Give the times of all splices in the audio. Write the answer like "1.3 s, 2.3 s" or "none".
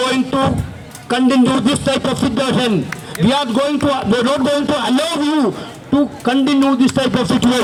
none